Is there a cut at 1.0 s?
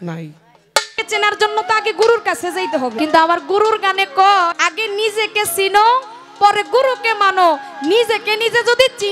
yes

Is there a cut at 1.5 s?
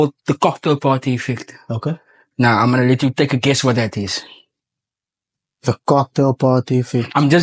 no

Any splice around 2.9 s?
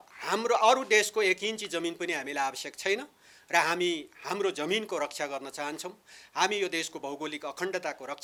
no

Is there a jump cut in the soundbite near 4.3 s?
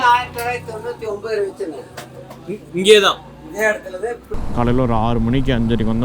yes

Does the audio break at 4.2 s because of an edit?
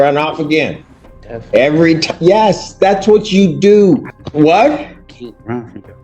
yes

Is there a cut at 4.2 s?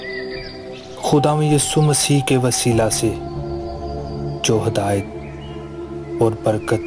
no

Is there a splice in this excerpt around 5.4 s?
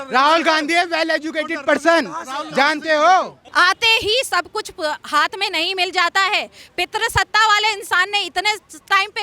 no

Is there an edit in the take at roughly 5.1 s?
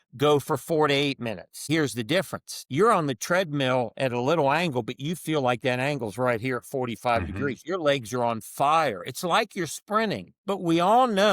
no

